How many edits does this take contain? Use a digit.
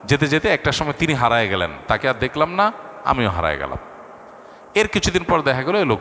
0